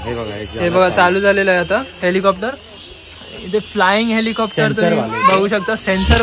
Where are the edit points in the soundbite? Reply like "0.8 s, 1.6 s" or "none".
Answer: none